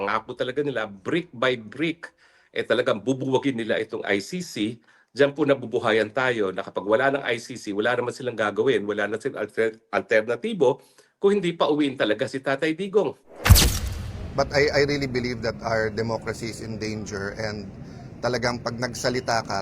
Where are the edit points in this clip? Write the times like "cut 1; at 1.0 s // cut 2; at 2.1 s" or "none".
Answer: cut 1; at 13.7 s